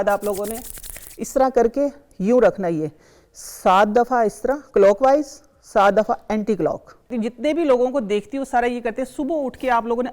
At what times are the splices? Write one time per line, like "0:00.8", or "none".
0:07.1